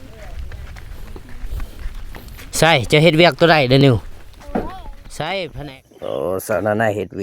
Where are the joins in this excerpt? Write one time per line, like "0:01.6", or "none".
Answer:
0:05.5